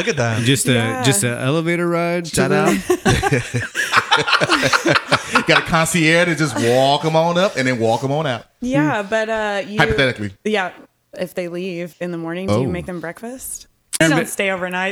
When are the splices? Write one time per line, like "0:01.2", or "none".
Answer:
0:14.0